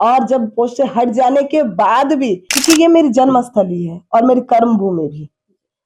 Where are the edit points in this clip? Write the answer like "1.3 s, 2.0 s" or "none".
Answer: 2.5 s